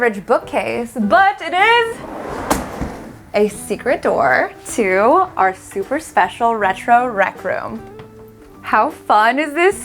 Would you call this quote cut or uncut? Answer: cut